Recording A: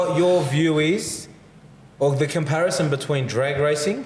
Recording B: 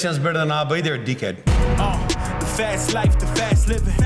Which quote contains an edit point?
B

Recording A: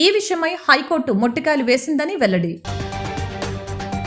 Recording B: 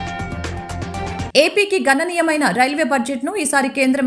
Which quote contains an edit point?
B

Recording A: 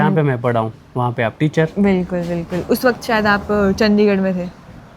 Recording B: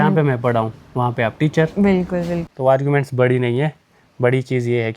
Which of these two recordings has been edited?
B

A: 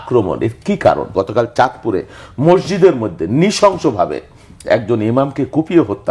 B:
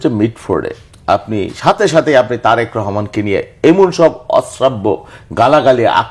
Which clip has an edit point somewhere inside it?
A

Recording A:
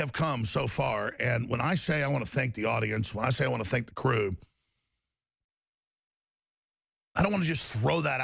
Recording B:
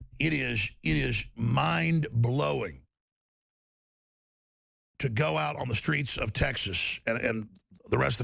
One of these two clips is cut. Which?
A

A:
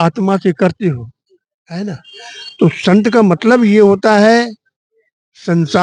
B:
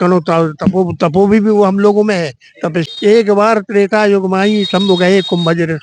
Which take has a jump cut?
B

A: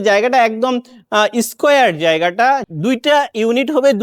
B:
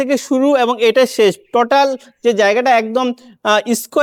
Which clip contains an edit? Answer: A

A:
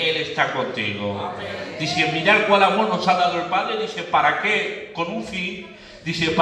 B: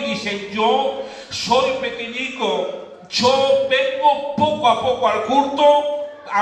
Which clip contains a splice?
B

